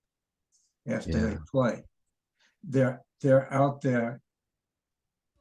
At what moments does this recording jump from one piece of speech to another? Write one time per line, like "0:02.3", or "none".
none